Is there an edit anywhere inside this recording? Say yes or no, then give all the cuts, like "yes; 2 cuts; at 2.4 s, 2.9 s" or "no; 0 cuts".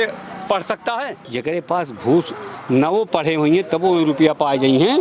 yes; 1 cut; at 1.2 s